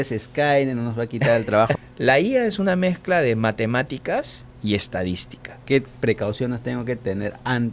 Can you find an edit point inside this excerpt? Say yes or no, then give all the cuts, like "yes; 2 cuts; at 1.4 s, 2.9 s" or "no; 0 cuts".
yes; 2 cuts; at 1.8 s, 5.6 s